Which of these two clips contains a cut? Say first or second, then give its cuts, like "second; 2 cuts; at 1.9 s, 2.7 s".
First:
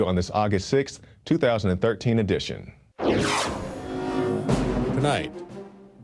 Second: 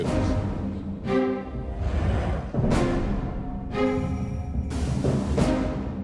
second; 1 cut; at 2.6 s